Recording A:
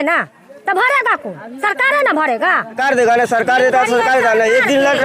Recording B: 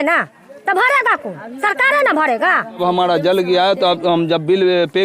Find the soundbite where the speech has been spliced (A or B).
A